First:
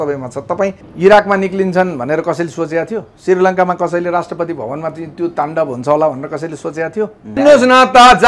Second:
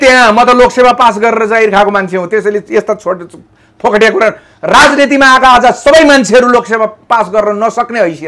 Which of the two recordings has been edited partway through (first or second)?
first